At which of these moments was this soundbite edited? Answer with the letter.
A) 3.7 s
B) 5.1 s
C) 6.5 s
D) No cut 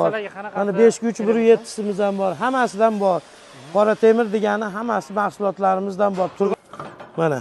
C